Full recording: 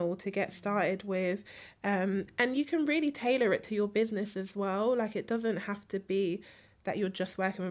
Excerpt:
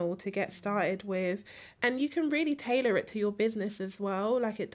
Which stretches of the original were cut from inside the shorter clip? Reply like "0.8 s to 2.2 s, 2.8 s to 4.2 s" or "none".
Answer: 1.7 s to 2.3 s